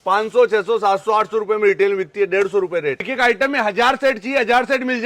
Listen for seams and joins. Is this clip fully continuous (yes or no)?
no